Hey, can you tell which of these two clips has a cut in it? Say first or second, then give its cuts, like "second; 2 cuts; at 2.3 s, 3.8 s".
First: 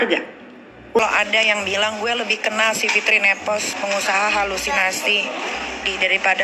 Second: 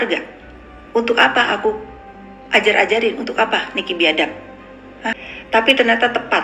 first; 1 cut; at 1.0 s